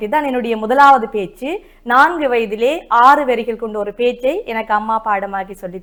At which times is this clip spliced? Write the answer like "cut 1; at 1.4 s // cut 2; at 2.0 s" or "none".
none